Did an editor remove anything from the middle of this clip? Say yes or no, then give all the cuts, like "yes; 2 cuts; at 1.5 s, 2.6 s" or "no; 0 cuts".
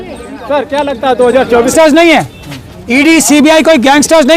yes; 1 cut; at 1.7 s